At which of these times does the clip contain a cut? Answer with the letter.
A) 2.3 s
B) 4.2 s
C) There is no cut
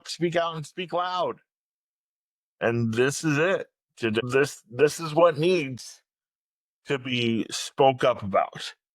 B